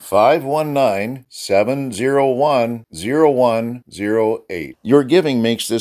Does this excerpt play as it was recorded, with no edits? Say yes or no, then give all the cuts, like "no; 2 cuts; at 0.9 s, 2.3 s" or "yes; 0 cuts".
yes; 0 cuts